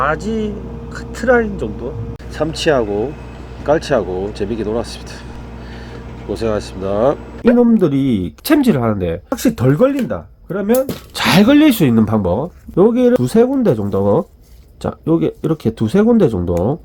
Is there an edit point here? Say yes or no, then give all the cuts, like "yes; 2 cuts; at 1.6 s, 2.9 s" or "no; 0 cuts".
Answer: yes; 4 cuts; at 7.3 s, 8.3 s, 9.2 s, 13.0 s